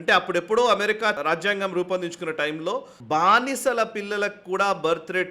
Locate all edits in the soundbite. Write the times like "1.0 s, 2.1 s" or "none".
1.2 s, 2.9 s